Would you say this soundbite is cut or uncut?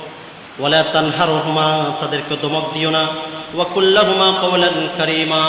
uncut